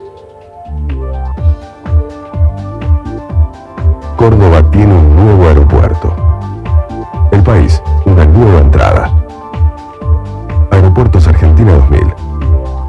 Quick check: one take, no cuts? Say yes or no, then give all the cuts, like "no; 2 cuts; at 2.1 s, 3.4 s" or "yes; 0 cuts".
yes; 0 cuts